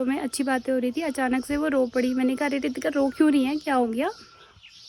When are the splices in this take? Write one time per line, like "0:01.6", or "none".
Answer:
none